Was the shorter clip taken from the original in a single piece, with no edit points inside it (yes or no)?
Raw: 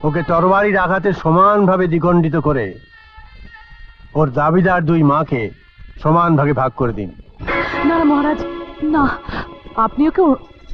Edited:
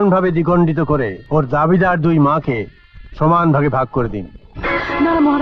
no